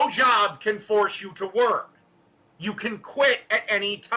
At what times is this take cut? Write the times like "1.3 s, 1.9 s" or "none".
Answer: 3.0 s